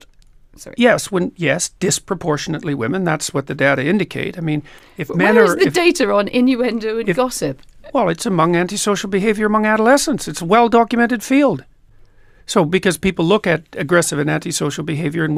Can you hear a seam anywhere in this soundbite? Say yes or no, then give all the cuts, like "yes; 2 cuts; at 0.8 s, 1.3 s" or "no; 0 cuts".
no; 0 cuts